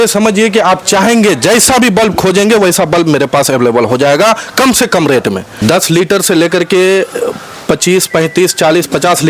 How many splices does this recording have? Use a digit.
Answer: 1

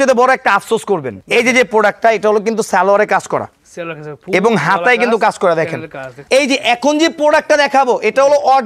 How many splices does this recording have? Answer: 1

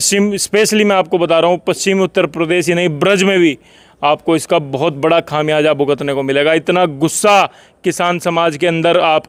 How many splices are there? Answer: 0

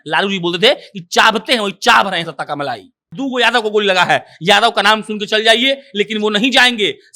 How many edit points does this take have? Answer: 1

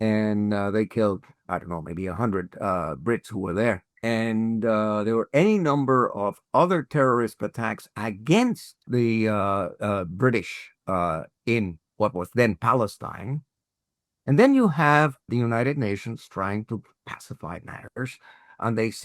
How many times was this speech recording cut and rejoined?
4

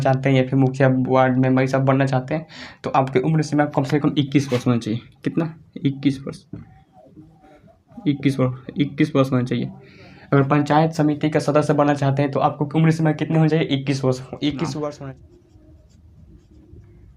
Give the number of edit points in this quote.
1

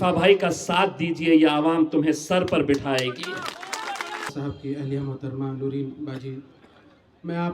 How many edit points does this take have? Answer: 1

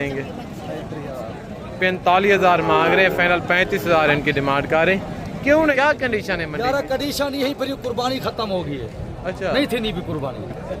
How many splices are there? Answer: 1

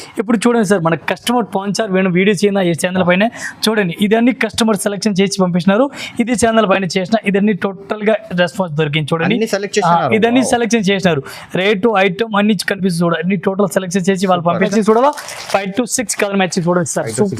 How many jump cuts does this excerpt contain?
1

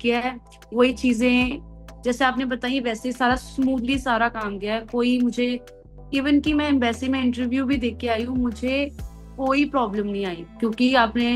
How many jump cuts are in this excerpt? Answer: 0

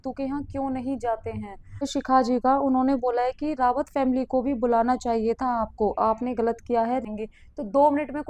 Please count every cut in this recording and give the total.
2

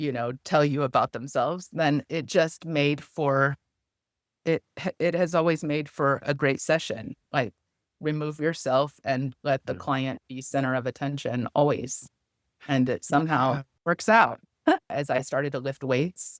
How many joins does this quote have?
2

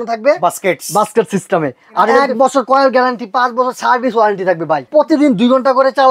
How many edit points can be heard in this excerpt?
2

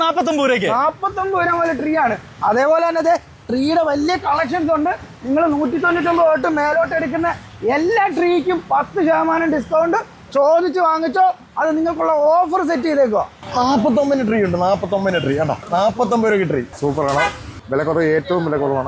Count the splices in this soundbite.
0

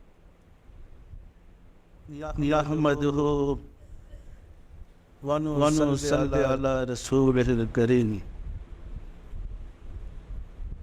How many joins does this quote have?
1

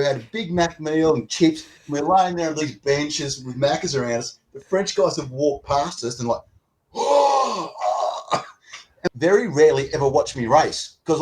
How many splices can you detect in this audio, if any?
1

